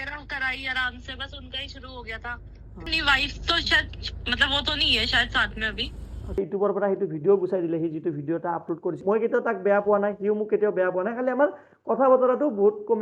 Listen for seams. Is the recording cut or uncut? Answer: cut